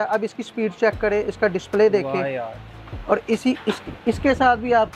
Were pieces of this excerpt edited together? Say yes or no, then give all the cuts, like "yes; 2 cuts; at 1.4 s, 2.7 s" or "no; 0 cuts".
no; 0 cuts